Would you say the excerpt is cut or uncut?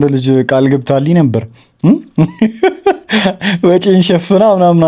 uncut